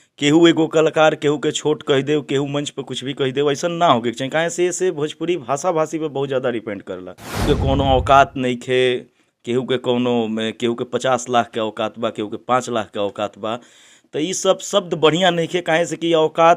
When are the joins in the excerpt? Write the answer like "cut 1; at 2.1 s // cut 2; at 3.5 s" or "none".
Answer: cut 1; at 7.4 s